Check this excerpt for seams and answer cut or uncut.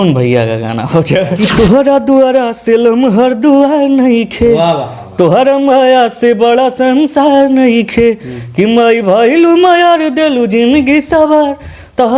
cut